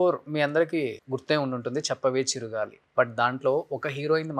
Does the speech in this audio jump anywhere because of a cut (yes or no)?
yes